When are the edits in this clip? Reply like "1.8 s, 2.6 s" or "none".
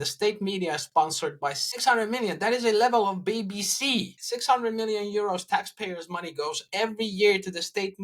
1.7 s, 4.2 s